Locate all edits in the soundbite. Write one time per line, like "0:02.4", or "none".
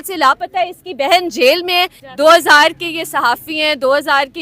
0:02.0